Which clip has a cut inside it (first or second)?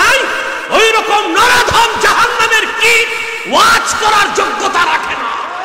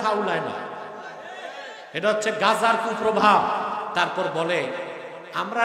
second